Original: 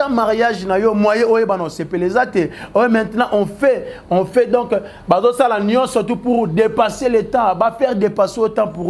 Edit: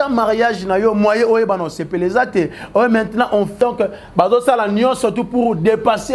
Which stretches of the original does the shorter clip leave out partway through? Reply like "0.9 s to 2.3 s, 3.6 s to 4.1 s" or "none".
3.6 s to 4.5 s